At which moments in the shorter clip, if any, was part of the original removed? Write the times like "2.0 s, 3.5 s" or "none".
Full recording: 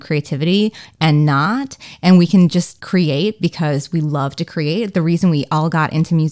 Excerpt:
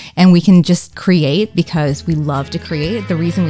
none